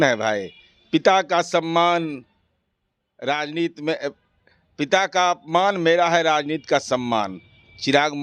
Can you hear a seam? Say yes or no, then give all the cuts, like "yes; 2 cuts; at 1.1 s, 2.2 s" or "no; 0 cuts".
no; 0 cuts